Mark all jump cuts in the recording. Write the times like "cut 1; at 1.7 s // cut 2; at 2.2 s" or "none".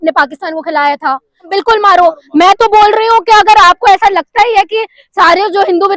cut 1; at 1.5 s